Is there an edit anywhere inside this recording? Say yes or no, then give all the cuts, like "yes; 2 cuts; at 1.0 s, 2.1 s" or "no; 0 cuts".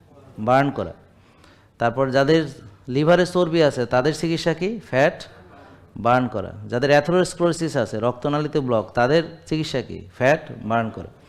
no; 0 cuts